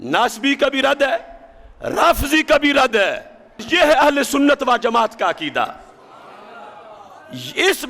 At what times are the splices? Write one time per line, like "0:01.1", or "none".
0:03.6